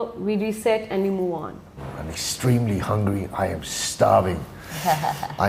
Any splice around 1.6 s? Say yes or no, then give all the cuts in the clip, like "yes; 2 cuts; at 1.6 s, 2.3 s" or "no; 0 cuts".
yes; 1 cut; at 1.6 s